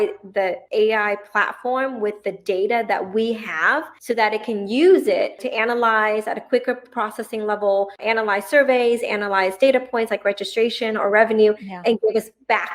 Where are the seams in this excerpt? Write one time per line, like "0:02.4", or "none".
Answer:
none

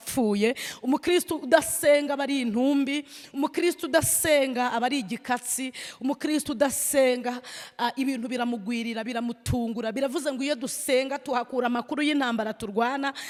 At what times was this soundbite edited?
none

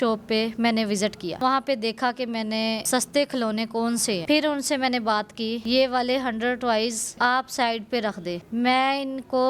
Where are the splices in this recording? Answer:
0:01.4
0:02.8
0:04.2

